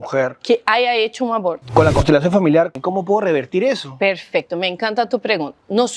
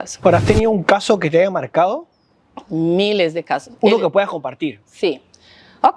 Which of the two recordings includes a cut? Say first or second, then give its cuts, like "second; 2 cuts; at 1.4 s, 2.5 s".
first; 2 cuts; at 1.6 s, 2.8 s